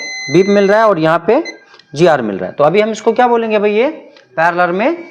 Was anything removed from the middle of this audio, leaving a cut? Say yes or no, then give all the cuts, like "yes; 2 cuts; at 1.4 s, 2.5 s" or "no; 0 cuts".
no; 0 cuts